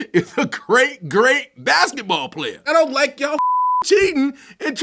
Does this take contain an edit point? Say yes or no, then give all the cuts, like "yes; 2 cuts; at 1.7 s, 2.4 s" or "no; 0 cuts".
yes; 1 cut; at 2.6 s